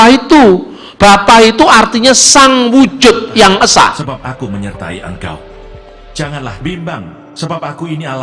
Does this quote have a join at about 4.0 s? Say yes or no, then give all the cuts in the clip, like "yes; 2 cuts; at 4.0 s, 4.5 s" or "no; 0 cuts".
yes; 1 cut; at 4.0 s